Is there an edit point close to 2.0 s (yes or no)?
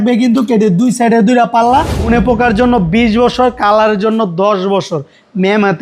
yes